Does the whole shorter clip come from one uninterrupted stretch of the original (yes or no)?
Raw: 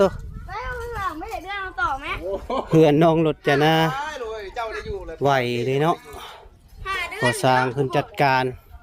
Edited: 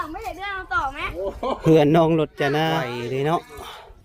no